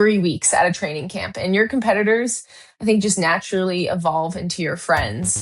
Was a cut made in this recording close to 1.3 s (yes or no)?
yes